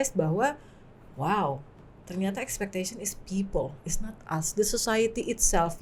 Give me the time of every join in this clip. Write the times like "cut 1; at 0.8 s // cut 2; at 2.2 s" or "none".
none